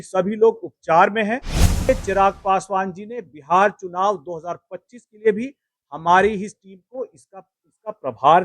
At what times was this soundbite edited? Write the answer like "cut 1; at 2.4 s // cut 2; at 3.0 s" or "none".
cut 1; at 1.8 s